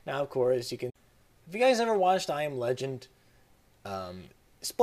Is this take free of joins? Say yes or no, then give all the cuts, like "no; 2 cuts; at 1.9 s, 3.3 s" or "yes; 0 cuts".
yes; 0 cuts